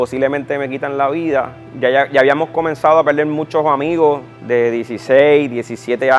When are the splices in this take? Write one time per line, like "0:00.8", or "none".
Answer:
0:01.6
0:04.3